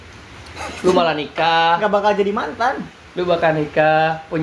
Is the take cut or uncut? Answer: uncut